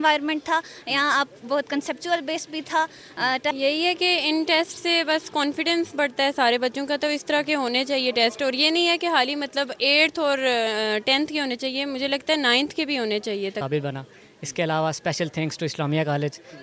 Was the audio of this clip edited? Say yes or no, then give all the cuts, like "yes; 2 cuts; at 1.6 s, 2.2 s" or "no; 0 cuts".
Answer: yes; 2 cuts; at 3.5 s, 13.6 s